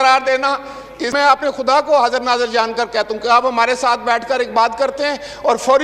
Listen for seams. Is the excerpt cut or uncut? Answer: cut